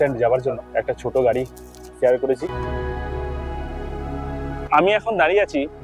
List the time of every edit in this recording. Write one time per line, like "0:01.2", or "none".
0:02.5
0:04.6